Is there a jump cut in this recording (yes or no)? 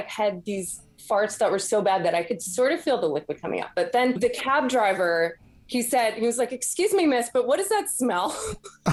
no